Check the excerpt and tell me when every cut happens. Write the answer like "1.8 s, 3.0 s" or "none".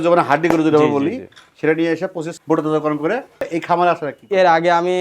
3.4 s

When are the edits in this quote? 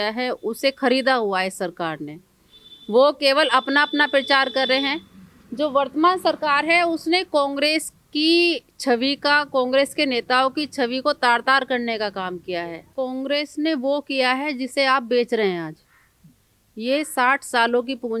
12.9 s

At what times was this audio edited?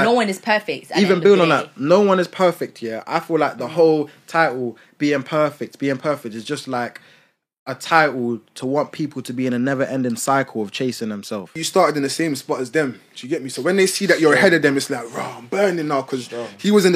11.6 s

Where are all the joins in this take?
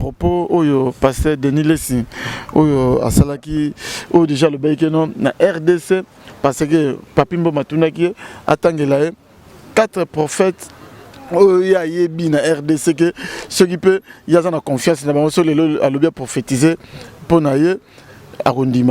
none

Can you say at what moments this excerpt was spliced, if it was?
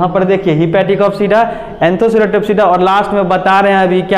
none

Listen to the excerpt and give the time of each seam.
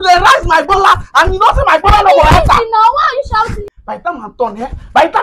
3.6 s

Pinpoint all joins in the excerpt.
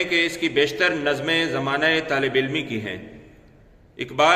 none

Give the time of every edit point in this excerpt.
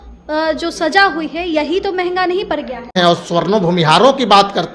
3.0 s

